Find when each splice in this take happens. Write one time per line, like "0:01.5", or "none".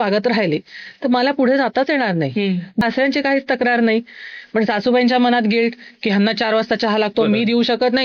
0:02.8